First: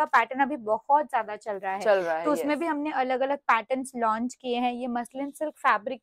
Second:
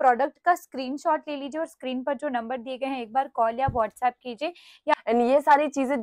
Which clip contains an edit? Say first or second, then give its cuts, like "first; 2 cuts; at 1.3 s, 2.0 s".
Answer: second; 1 cut; at 4.9 s